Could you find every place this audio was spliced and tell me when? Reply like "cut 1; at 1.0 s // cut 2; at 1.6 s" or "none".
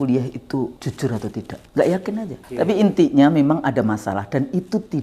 cut 1; at 1.1 s // cut 2; at 2.6 s